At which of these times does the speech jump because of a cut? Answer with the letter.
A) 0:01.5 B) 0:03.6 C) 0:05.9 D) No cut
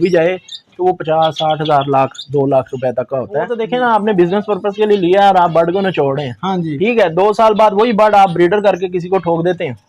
B